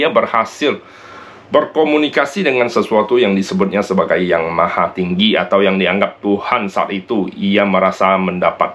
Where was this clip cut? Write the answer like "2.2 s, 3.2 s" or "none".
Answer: none

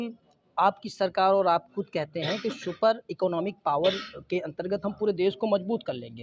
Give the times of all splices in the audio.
none

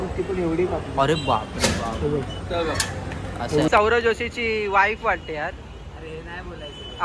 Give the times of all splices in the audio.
3.7 s

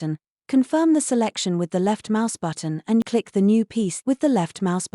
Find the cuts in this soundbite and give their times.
3.0 s, 4.0 s

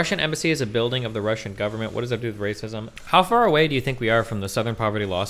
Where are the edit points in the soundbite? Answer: 2.9 s

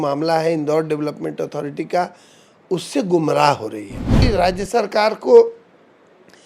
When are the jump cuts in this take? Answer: 4.2 s

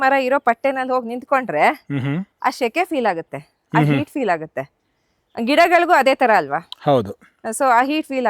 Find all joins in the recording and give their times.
none

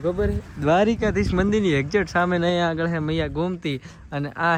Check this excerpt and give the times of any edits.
none

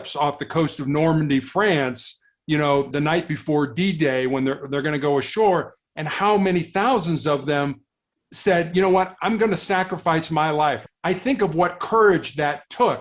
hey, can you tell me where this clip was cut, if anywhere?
10.8 s

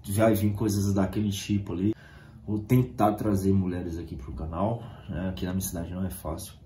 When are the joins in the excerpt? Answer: 1.7 s

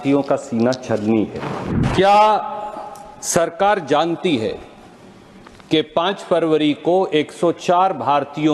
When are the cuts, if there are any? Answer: 1.7 s

